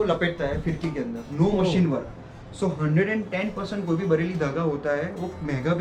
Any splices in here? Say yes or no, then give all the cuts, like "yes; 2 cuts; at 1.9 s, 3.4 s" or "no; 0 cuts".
no; 0 cuts